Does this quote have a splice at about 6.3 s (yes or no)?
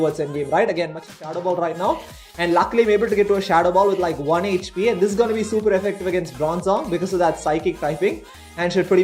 no